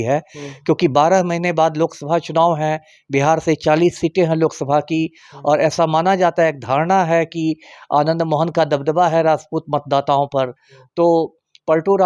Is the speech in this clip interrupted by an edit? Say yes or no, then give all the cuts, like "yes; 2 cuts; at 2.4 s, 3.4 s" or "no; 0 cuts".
no; 0 cuts